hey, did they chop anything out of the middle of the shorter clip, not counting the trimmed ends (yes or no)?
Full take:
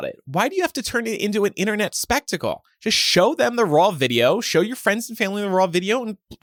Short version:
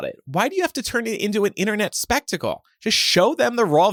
no